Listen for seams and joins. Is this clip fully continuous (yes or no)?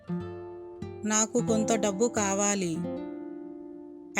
no